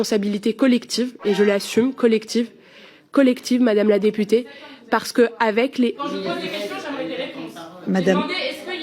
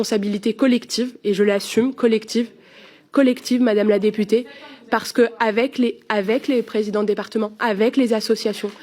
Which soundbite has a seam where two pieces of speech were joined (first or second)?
first